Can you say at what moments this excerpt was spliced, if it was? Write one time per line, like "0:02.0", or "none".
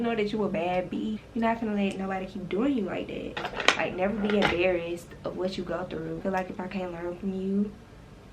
0:01.2
0:03.5
0:06.2